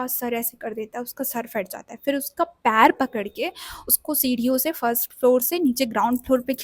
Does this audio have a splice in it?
no; 0 cuts

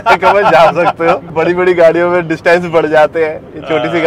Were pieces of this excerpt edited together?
yes; 1 cut; at 1.3 s

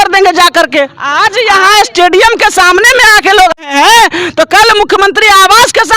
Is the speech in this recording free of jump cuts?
no; 2 cuts; at 1.0 s, 3.6 s

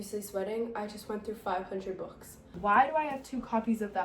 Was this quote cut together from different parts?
yes; 1 cut; at 2.4 s

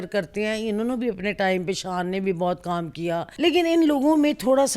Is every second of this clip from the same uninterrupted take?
no; 1 cut; at 3.3 s

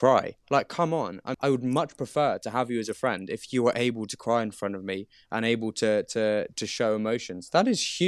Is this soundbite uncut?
no; 1 cut; at 1.2 s

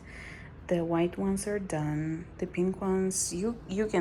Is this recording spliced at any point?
no; 0 cuts

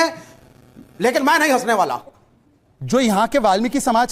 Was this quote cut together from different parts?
yes; 1 cut; at 2.0 s

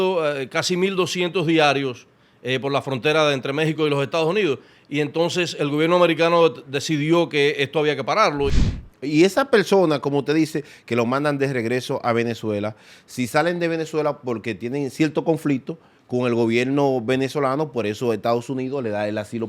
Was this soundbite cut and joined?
yes; 1 cut; at 8.6 s

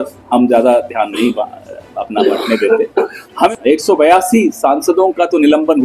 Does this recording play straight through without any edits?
no; 1 cut; at 3.5 s

